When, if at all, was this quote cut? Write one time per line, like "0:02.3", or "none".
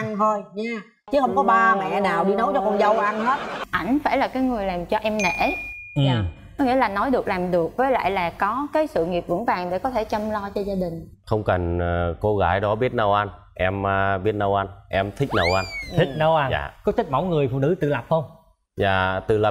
0:03.6
0:11.1